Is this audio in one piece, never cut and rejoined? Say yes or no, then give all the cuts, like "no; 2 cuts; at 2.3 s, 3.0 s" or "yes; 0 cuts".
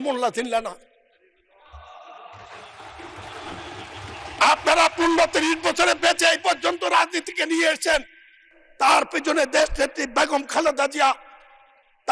yes; 0 cuts